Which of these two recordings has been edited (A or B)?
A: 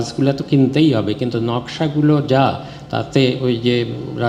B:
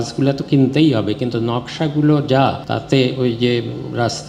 B